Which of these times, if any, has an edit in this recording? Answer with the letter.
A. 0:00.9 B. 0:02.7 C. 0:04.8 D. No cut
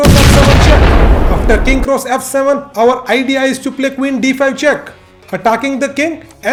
D